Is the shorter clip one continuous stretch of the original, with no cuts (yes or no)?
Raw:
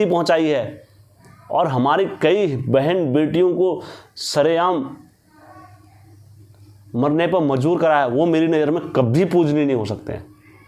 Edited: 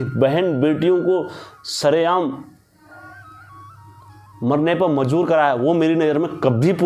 yes